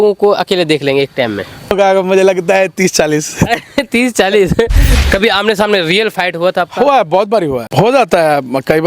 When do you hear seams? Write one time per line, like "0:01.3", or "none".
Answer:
0:01.7
0:04.8
0:07.6